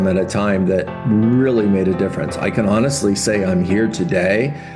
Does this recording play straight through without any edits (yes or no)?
yes